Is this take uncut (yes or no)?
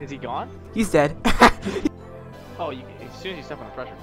no